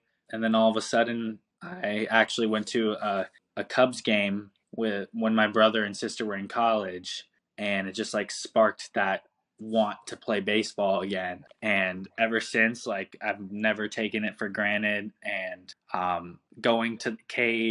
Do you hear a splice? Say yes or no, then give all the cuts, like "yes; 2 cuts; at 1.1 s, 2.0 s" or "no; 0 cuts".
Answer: no; 0 cuts